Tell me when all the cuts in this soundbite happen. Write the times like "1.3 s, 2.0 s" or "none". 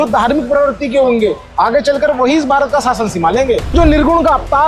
3.7 s